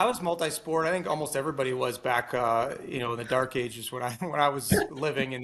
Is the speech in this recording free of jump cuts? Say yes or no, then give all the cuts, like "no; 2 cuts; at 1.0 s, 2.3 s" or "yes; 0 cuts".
yes; 0 cuts